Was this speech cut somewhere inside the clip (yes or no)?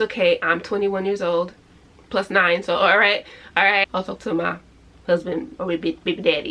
yes